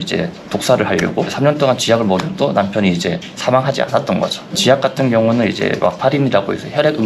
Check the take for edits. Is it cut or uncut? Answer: cut